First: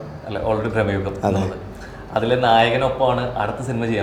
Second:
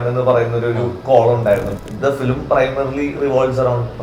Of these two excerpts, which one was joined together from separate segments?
second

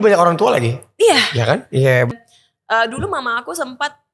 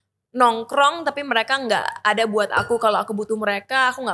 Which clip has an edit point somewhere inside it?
first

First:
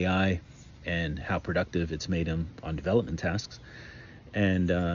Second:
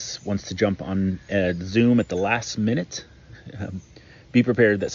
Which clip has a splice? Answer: second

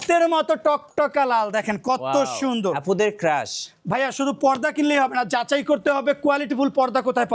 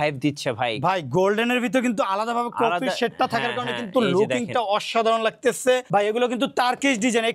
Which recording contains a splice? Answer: second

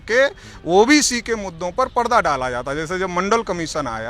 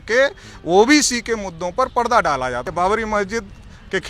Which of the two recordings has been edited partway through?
second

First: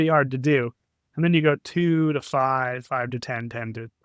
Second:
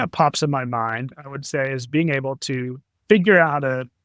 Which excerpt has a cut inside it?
second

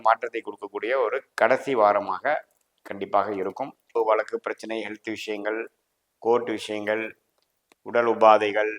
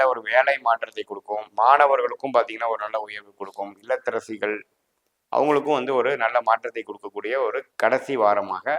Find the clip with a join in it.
first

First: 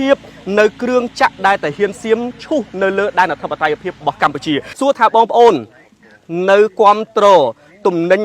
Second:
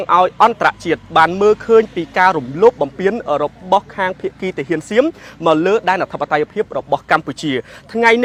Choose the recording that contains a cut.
first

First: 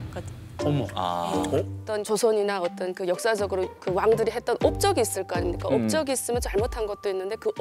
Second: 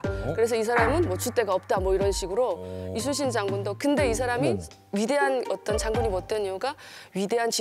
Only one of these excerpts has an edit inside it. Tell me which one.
first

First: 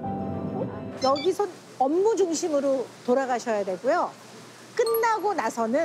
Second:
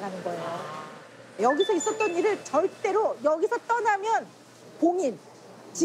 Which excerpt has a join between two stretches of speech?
first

